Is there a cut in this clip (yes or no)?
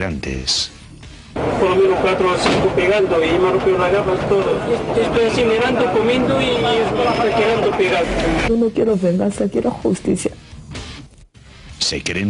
no